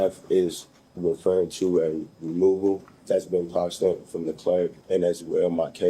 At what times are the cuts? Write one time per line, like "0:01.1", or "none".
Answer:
0:02.9
0:04.8